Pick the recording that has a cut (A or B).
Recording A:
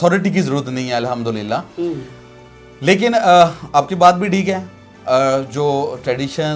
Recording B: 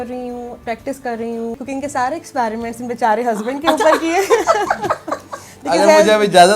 B